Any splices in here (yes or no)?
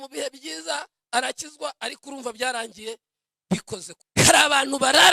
yes